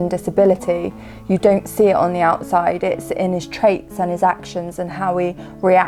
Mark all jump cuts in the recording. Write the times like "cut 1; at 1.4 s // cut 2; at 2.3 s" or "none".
none